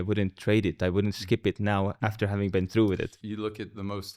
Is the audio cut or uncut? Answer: cut